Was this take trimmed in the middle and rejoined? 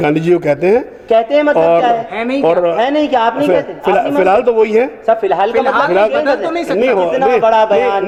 no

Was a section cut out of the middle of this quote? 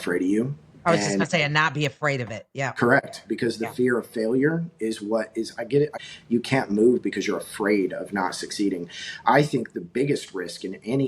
yes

